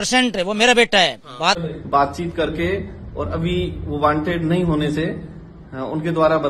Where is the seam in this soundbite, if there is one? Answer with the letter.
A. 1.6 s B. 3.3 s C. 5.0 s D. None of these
A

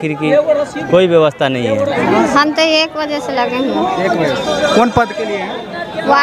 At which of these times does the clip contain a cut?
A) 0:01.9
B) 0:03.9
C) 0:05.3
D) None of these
A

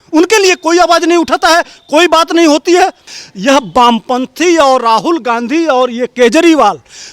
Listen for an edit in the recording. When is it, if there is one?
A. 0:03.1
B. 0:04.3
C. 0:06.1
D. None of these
A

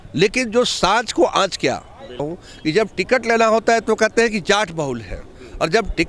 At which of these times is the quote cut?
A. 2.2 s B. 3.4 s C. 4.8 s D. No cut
A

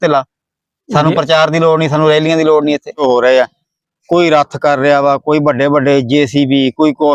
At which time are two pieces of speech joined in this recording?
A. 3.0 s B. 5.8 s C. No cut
A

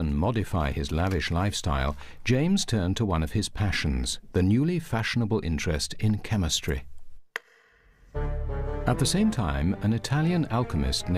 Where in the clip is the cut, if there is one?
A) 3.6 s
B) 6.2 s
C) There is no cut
A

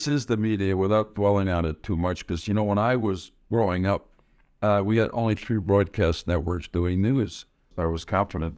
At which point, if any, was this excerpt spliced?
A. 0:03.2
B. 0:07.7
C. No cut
B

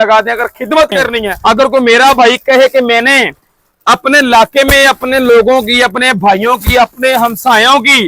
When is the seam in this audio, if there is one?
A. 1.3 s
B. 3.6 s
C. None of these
A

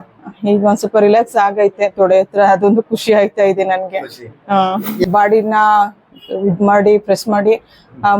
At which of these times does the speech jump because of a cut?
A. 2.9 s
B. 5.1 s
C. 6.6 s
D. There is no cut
B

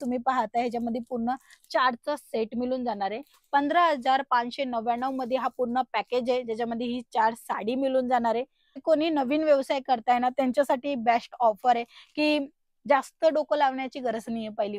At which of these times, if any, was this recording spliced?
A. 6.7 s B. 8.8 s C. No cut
B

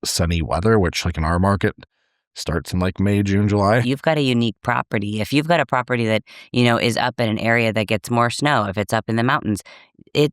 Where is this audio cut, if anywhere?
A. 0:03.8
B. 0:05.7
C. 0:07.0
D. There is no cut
A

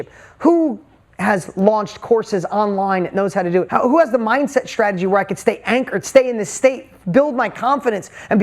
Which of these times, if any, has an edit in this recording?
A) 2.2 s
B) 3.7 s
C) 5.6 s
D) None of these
B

